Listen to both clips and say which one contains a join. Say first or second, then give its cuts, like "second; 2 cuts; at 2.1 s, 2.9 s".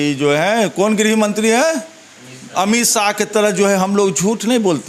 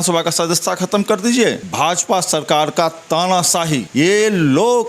second; 2 cuts; at 1.6 s, 3.9 s